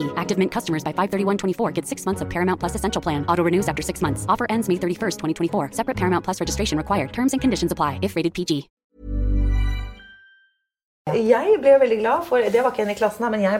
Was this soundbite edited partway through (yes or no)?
yes